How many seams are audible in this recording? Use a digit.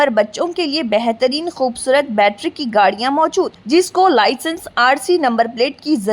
0